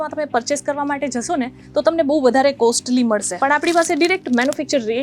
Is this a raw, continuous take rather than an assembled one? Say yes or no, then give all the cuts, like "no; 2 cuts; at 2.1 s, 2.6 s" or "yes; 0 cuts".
no; 1 cut; at 3.3 s